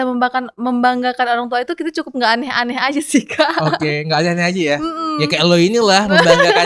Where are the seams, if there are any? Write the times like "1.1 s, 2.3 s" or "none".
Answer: none

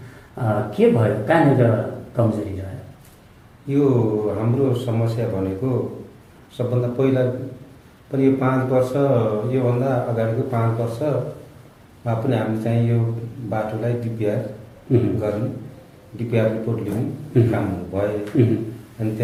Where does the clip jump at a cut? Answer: none

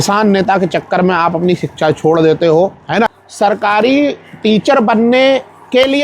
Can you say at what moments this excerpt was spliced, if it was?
3.2 s

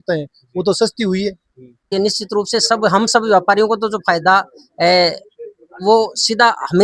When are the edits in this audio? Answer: 1.9 s

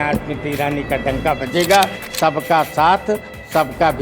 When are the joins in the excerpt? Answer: 2.0 s

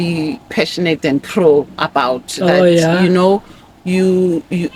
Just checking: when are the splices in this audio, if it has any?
none

